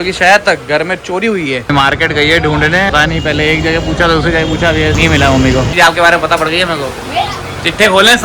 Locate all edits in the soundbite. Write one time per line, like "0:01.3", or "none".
0:01.7
0:02.9
0:05.0
0:05.7

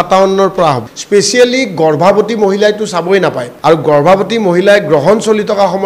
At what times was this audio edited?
0:00.9
0:03.5

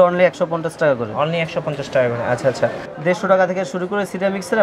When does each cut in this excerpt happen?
0:02.9

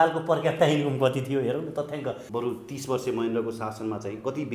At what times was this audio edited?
0:02.2

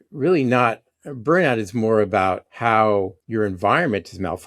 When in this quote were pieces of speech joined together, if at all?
0:02.5
0:03.2

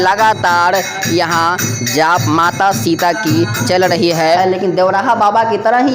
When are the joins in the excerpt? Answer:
0:04.4

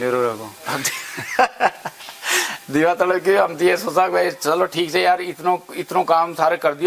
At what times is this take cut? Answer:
none

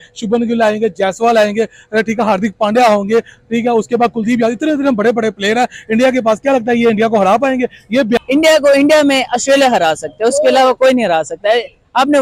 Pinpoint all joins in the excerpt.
0:08.2

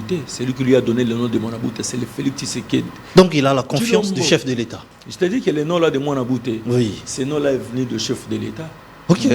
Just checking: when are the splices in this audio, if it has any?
none

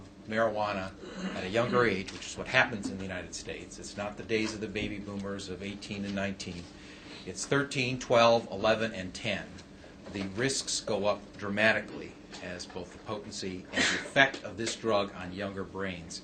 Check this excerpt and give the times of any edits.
none

